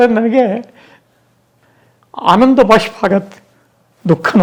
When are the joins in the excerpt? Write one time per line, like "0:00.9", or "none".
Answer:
none